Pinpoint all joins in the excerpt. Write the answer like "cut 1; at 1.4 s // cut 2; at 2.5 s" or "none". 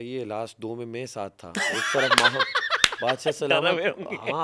none